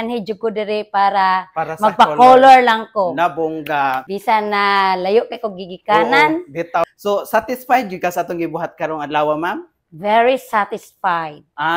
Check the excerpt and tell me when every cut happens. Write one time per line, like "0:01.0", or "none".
0:04.0
0:06.9